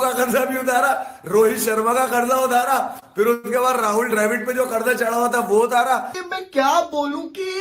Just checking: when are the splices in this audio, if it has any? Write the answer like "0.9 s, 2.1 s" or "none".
6.2 s